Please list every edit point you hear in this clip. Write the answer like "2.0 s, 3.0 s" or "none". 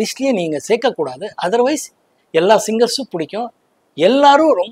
none